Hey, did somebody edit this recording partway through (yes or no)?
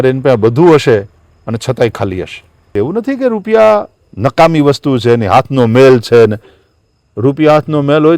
yes